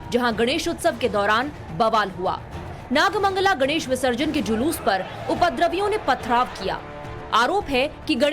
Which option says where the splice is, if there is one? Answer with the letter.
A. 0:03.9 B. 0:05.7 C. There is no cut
B